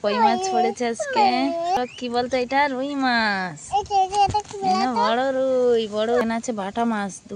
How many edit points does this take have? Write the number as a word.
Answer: two